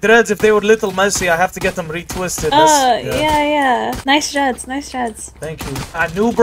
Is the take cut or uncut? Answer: uncut